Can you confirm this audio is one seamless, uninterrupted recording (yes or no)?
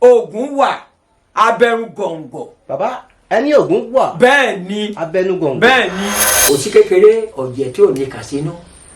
no